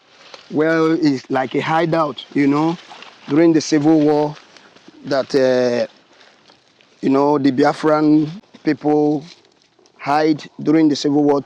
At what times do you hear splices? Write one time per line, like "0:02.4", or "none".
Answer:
0:08.4